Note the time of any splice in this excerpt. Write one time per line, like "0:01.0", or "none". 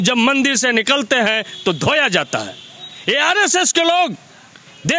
none